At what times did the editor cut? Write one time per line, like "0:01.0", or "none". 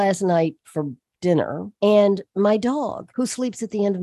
0:01.7
0:03.0